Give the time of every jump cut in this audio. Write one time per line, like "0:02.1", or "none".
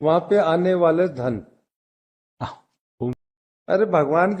0:03.1